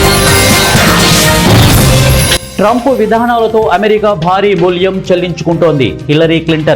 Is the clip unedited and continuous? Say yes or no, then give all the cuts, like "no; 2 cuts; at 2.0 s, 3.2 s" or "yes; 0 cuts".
yes; 0 cuts